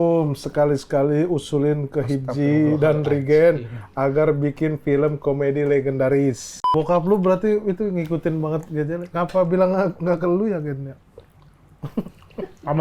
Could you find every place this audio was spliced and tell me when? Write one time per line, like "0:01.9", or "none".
0:06.6